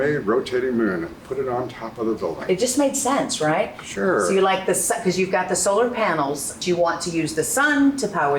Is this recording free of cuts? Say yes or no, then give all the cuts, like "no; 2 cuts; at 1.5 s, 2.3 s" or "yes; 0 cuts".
no; 1 cut; at 6.6 s